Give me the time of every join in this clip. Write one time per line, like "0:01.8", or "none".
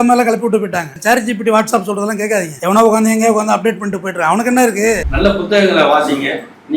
0:05.1